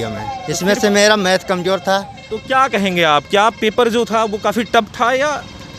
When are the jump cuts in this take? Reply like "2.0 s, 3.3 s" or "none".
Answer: none